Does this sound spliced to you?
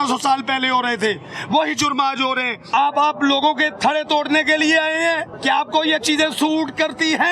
yes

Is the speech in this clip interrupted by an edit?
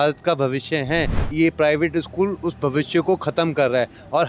yes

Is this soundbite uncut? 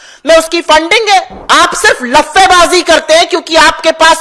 no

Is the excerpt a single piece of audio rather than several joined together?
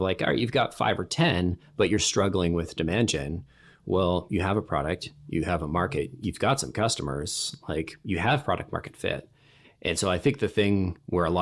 yes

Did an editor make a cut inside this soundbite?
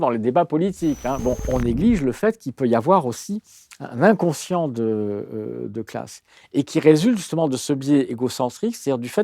yes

